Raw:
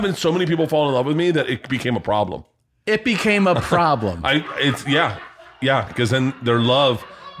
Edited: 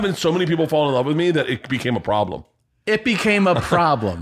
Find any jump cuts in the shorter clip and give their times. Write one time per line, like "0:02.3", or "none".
none